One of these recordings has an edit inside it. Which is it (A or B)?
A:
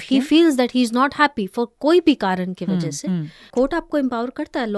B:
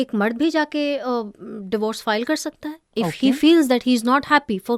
A